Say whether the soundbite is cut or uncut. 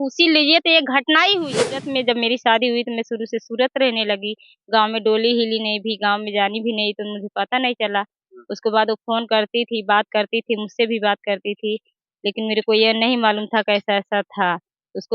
cut